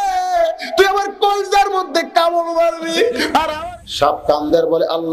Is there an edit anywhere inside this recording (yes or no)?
yes